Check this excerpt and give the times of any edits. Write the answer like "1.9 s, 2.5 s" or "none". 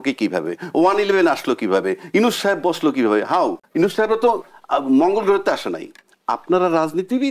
3.6 s